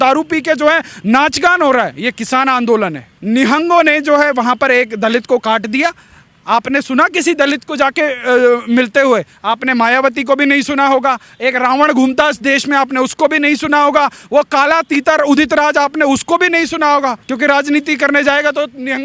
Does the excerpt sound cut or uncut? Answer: cut